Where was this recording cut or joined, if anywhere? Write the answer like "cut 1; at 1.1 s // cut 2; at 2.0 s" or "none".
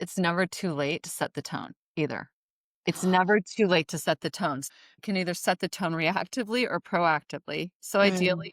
cut 1; at 4.6 s